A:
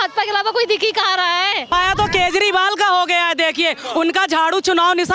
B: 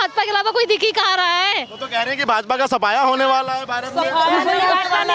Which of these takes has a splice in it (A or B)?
A